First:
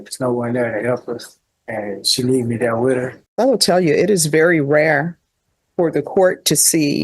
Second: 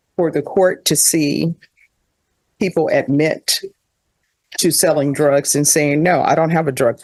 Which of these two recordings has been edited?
first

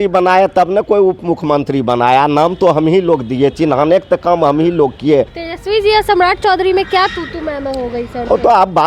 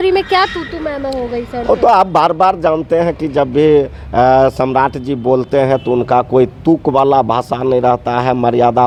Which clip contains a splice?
first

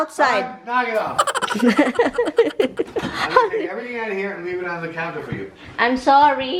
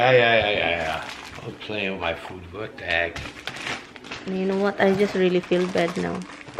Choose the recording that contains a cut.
first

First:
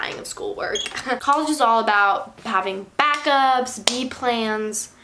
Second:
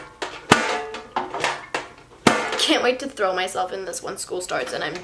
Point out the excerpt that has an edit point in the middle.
first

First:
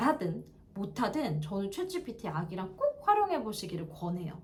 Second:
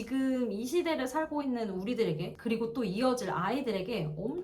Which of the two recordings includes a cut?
second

